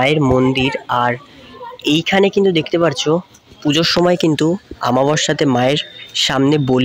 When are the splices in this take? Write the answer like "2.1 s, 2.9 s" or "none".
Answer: none